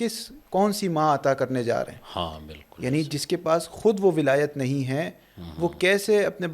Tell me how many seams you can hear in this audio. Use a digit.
0